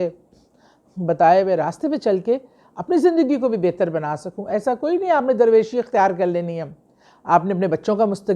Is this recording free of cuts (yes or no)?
yes